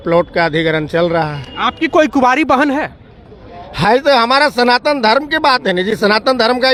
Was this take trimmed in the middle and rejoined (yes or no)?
no